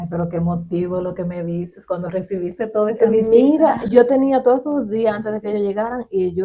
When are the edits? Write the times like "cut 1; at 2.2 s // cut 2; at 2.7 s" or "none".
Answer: none